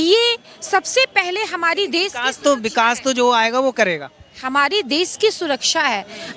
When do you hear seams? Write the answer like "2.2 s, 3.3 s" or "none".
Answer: none